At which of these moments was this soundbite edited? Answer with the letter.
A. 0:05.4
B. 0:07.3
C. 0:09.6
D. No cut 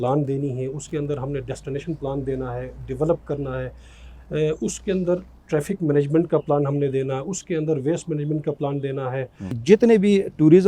C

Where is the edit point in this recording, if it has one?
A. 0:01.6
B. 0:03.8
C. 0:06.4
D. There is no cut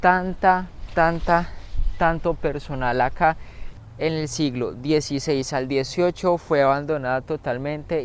B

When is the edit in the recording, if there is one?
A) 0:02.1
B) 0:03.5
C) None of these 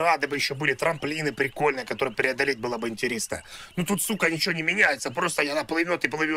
C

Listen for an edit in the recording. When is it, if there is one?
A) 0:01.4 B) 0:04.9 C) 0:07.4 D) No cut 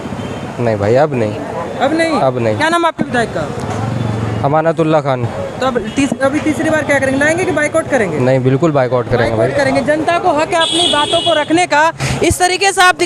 D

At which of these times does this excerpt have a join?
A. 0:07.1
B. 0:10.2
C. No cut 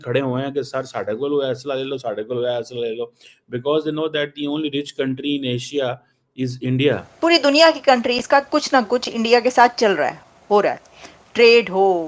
A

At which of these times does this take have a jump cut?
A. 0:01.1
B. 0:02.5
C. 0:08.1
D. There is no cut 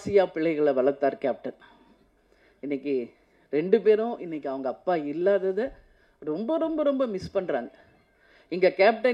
D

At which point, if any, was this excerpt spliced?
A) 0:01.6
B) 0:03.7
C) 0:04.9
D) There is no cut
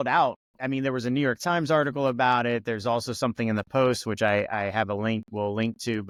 D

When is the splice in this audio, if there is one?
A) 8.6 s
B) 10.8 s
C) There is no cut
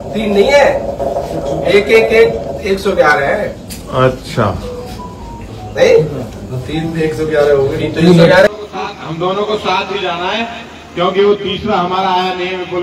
A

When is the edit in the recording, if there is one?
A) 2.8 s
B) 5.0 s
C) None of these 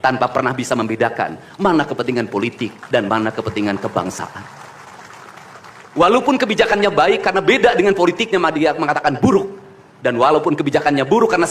C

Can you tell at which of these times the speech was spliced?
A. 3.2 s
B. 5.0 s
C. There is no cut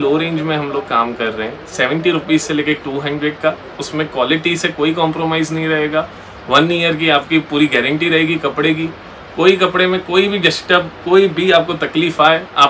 C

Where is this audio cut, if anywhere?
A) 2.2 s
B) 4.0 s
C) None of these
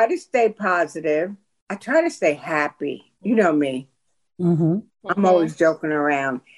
C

